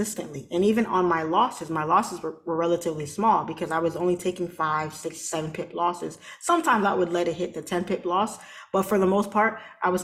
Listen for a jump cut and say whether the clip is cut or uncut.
uncut